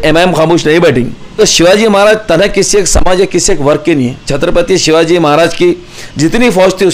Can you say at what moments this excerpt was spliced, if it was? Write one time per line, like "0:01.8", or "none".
0:01.4
0:04.3